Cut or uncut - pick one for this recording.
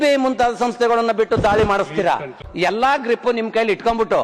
cut